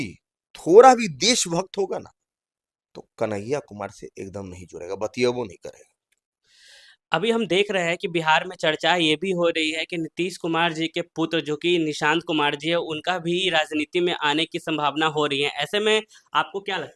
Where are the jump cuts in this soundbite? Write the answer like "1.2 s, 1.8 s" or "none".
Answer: none